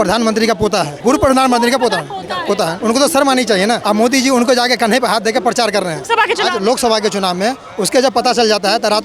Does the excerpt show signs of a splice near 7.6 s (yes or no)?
no